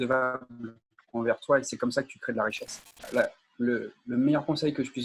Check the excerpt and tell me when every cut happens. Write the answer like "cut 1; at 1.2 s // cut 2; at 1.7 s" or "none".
cut 1; at 3.1 s